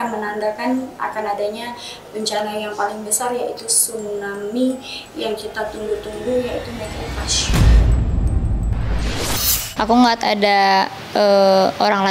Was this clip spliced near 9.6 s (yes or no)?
yes